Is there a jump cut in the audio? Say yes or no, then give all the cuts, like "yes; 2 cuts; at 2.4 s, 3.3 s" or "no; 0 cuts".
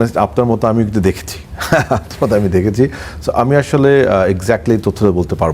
no; 0 cuts